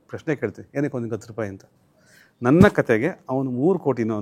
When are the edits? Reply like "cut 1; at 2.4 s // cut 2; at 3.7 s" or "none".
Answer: none